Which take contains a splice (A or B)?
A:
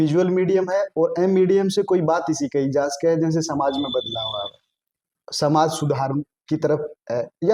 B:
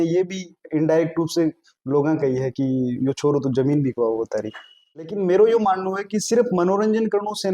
B